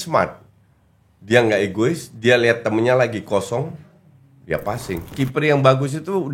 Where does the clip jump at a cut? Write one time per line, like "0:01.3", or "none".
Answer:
0:05.1